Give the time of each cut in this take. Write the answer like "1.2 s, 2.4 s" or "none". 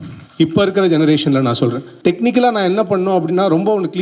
1.9 s